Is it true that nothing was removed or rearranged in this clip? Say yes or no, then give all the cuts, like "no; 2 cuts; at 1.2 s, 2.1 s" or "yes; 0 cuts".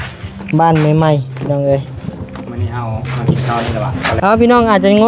no; 1 cut; at 4.1 s